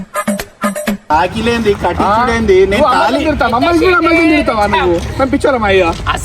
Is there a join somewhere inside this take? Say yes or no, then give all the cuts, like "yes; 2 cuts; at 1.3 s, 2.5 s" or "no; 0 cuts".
yes; 1 cut; at 1.1 s